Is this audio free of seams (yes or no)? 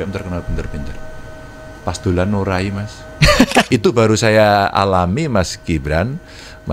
no